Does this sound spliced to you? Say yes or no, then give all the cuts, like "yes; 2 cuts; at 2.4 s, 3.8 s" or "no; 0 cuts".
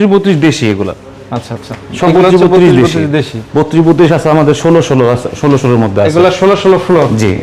no; 0 cuts